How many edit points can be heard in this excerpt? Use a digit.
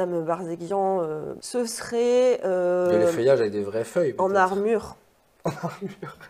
1